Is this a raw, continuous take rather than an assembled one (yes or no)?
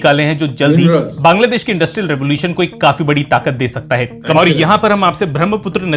no